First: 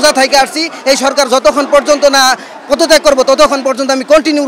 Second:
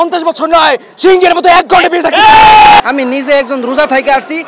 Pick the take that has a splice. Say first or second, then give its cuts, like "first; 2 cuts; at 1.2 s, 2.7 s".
second; 1 cut; at 2.8 s